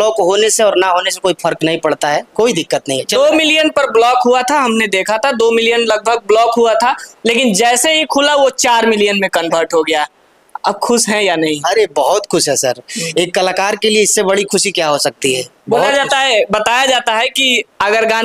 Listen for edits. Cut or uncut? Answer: uncut